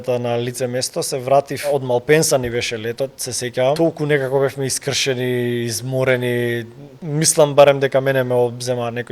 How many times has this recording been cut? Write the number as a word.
three